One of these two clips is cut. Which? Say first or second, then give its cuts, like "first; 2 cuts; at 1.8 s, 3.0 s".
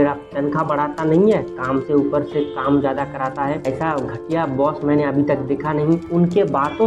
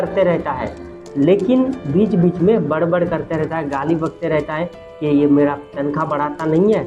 first; 2 cuts; at 3.6 s, 6.1 s